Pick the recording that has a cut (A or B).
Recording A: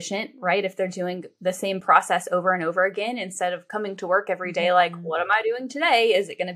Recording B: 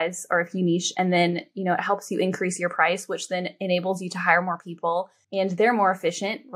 B